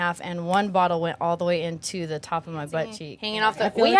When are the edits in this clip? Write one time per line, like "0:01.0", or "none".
0:03.1